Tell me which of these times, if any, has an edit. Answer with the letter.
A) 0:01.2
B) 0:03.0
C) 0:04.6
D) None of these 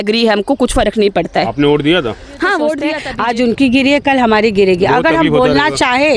B